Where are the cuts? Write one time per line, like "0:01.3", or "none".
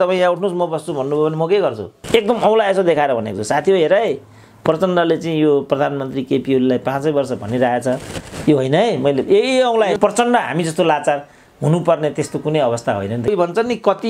0:01.9
0:10.0
0:13.3